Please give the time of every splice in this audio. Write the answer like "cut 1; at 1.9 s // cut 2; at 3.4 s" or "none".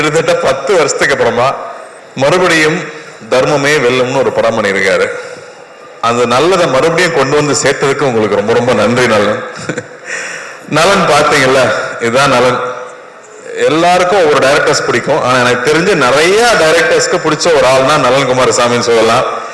none